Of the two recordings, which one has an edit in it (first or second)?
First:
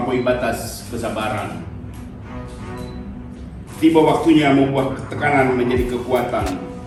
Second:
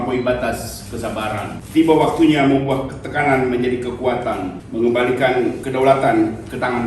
second